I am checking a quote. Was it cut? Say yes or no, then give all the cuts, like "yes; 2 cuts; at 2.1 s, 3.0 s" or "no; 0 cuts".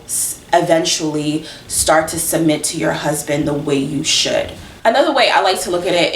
yes; 1 cut; at 4.8 s